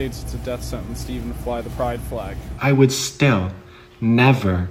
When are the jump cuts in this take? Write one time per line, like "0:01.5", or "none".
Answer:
0:02.5